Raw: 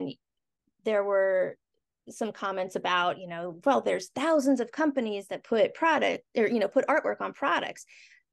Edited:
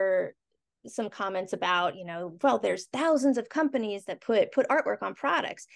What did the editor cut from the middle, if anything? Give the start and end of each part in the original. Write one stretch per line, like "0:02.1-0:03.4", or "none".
0:05.7-0:06.7